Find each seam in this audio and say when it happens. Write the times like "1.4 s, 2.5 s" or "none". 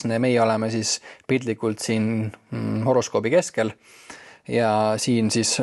none